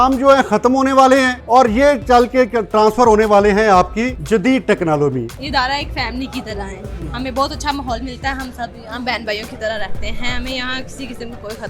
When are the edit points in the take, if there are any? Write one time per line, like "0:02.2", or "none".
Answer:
0:01.4
0:04.2
0:05.4